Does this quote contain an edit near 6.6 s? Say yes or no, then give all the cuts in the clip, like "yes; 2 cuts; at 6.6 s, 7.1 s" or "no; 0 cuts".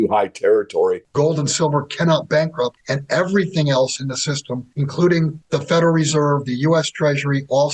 no; 4 cuts; at 1.0 s, 2.9 s, 4.7 s, 5.4 s